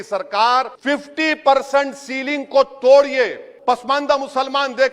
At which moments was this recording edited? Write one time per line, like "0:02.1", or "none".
0:03.5